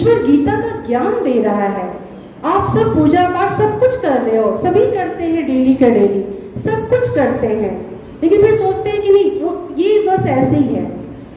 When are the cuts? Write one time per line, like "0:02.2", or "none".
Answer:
none